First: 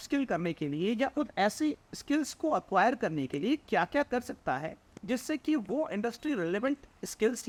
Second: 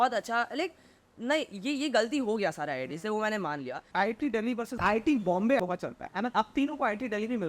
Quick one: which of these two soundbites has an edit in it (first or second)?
second